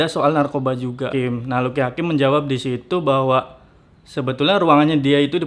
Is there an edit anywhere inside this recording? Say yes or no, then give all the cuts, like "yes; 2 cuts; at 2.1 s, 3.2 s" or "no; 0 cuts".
yes; 1 cut; at 1.1 s